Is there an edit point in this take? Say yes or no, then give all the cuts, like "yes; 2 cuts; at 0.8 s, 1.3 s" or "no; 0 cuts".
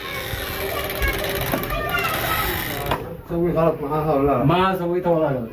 yes; 1 cut; at 3.2 s